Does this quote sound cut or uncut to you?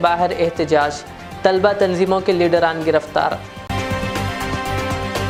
uncut